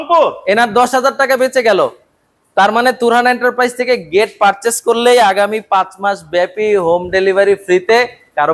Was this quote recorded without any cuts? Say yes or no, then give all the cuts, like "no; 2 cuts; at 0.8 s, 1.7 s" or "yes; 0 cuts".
yes; 0 cuts